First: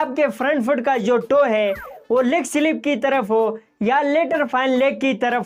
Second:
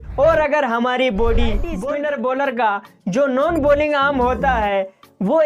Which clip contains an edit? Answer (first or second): second